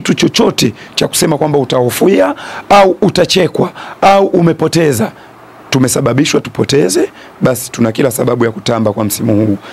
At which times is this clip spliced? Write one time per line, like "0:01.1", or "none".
none

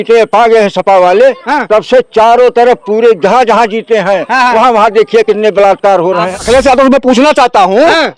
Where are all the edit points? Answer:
0:06.3

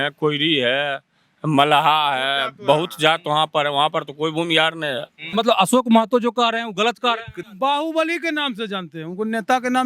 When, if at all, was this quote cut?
0:05.2
0:07.4

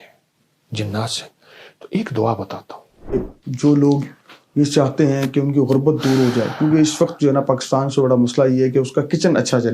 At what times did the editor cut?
0:03.1

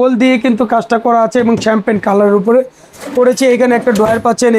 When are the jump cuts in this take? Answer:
none

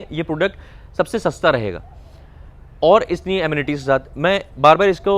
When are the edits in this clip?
none

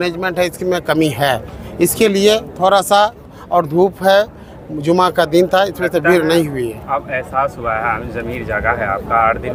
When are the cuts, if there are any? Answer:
none

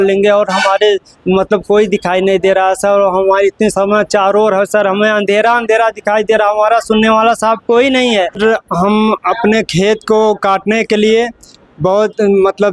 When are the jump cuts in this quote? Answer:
0:08.4

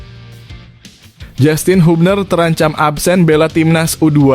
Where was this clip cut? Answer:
0:01.0

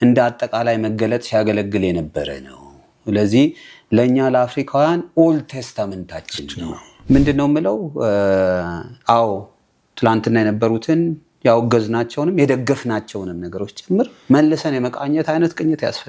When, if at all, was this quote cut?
0:06.9

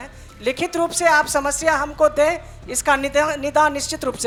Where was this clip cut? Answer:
none

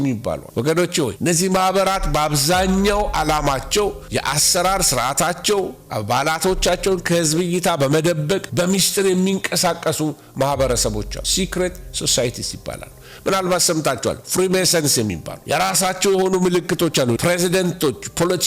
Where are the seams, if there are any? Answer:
0:01.1
0:15.3
0:17.2

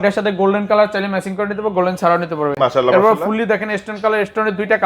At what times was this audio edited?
none

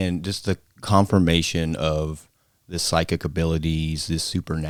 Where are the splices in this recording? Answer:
none

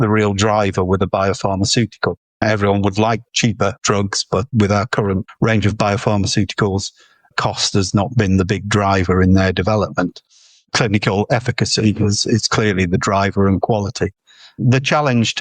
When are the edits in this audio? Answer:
0:02.4
0:03.8
0:05.3

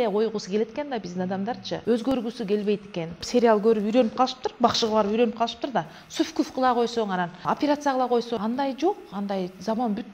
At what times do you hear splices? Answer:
0:01.8
0:03.2
0:07.4
0:08.3

